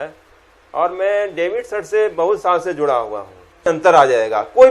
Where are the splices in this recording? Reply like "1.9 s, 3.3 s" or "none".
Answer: 3.6 s